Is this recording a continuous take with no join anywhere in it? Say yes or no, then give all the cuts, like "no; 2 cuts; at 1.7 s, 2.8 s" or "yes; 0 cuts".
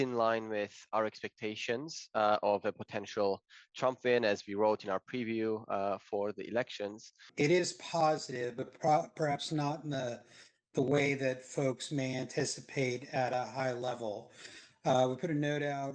no; 1 cut; at 7.2 s